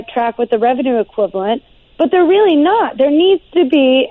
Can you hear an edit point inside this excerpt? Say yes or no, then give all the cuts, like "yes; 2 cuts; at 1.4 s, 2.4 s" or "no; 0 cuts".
no; 0 cuts